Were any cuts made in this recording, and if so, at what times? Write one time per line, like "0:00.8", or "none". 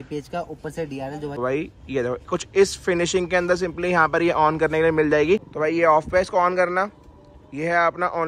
0:01.4
0:05.5